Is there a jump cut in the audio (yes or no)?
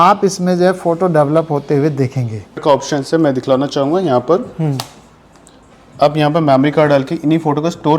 yes